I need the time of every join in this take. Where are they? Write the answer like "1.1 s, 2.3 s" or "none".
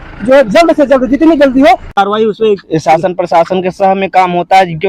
1.9 s